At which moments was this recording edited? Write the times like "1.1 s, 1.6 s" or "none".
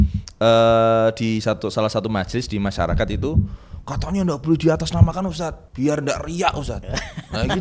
5.6 s